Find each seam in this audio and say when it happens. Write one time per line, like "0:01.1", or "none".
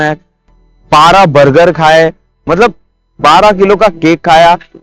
none